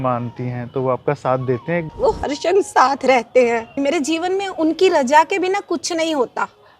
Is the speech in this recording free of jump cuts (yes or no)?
no